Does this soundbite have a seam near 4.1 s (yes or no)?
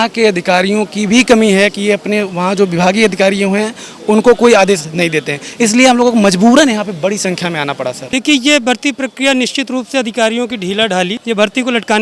no